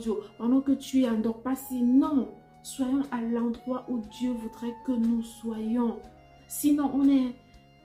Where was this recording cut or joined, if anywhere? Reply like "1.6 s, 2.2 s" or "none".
none